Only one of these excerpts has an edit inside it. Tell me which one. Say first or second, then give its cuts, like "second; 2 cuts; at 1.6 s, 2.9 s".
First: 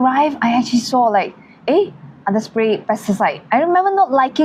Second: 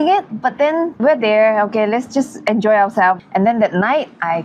second; 2 cuts; at 1.0 s, 3.2 s